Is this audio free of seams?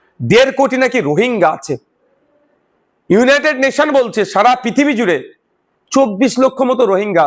yes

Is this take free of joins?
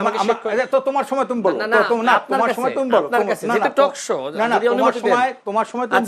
yes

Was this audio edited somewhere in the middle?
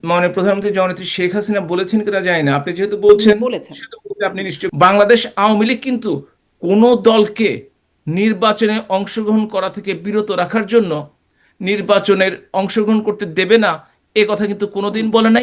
yes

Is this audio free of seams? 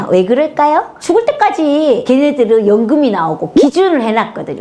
yes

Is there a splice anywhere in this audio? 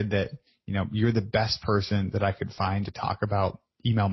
no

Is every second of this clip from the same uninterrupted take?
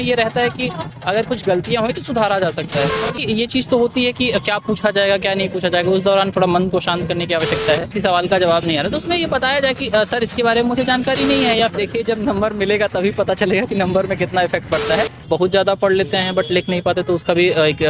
no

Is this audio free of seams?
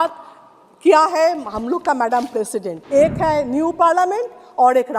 no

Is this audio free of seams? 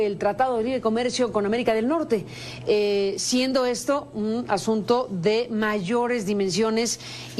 yes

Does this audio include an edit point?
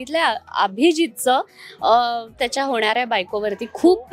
no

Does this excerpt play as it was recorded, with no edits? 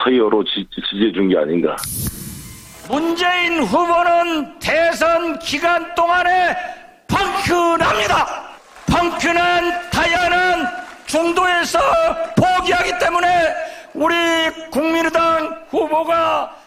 yes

